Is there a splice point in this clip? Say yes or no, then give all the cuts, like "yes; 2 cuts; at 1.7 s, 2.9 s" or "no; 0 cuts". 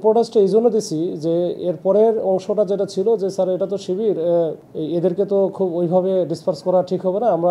no; 0 cuts